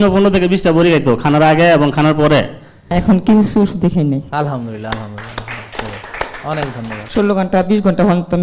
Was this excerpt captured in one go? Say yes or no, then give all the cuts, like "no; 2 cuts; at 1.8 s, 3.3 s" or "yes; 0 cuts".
no; 2 cuts; at 2.9 s, 7.0 s